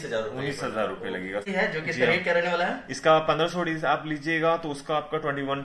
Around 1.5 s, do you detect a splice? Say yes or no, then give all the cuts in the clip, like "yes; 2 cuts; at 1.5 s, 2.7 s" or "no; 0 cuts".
yes; 1 cut; at 1.5 s